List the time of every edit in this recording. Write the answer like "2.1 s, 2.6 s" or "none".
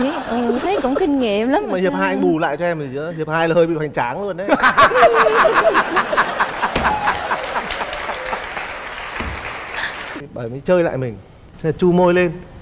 10.2 s